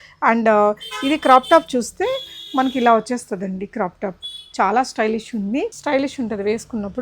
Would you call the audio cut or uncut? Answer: cut